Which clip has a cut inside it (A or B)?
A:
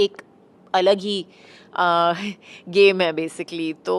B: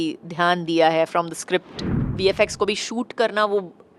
B